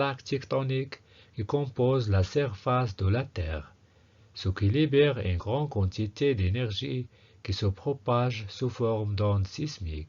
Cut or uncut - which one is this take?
cut